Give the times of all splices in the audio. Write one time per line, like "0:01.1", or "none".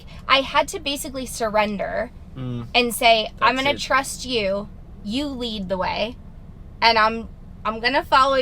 none